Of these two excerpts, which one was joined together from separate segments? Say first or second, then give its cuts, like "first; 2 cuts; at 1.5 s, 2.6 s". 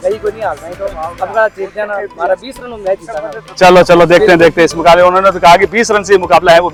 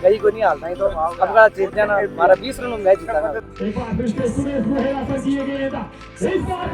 second; 1 cut; at 3.4 s